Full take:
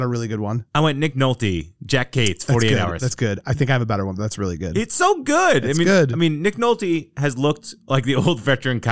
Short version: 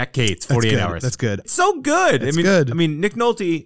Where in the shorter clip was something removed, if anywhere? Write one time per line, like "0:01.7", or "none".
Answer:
0:01.5

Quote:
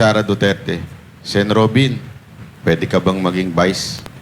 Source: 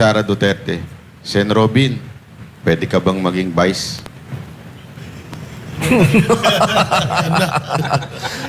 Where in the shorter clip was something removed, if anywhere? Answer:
none

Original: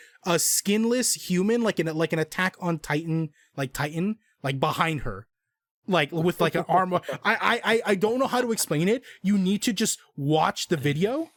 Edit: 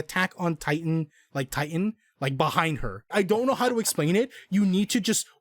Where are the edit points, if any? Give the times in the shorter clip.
0:03.1

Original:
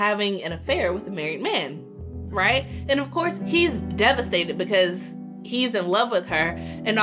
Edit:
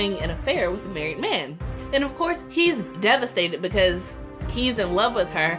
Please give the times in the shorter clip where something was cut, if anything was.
0:01.8

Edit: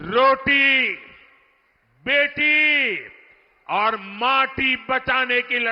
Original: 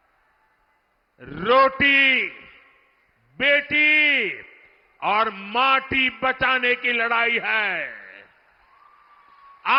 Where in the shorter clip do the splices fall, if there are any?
none

